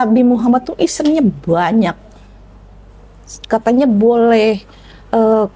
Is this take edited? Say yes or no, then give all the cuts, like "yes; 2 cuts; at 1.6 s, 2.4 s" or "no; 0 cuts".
no; 0 cuts